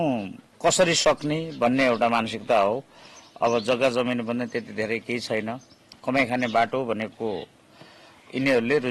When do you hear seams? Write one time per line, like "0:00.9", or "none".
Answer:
none